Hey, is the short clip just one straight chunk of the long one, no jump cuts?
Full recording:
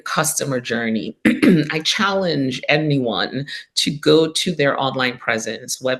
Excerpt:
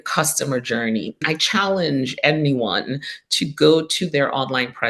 no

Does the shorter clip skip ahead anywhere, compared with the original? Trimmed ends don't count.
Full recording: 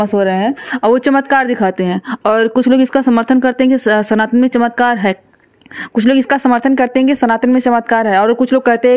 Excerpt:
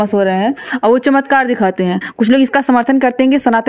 yes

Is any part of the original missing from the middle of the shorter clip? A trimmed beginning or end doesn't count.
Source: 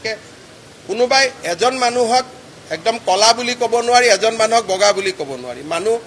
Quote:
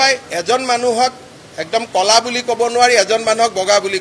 no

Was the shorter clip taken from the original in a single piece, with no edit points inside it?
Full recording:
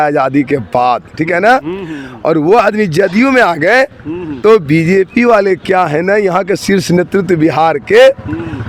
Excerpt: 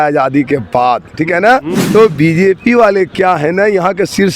no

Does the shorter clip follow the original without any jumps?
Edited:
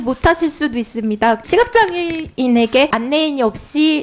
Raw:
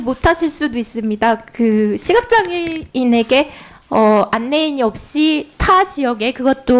no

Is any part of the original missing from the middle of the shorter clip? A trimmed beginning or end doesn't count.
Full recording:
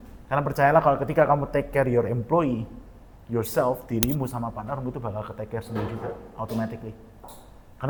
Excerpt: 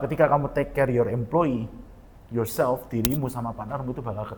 no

